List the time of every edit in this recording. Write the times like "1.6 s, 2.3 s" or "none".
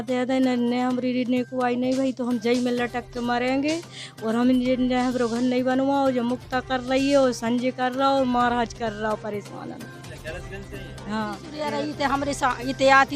11.5 s